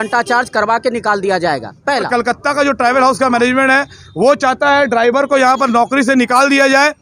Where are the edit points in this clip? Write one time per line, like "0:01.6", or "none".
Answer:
0:02.1